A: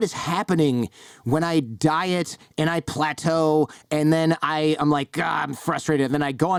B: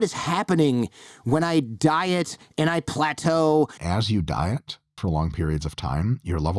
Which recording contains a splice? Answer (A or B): B